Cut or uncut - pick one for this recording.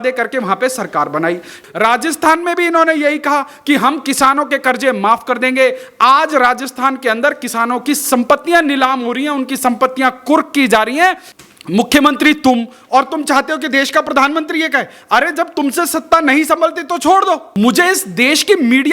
cut